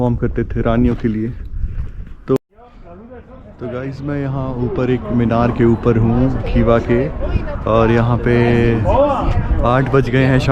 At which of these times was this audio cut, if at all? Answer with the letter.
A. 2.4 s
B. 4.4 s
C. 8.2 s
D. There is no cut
A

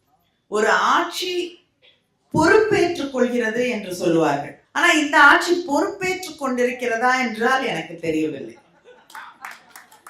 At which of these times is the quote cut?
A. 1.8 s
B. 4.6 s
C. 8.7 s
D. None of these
B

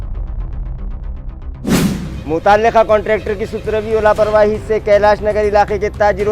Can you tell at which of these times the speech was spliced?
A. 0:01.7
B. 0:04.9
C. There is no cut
A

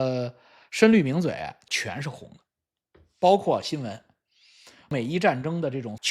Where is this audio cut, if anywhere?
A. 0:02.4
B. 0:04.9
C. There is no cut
B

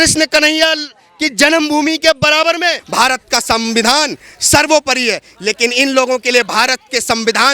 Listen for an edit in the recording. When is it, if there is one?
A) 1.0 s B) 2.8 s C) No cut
B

